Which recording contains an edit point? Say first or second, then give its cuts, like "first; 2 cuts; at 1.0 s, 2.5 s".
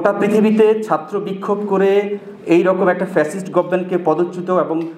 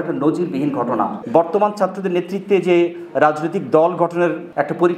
second; 1 cut; at 1.2 s